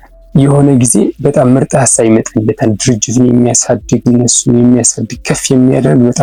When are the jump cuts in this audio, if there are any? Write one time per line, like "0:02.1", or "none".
none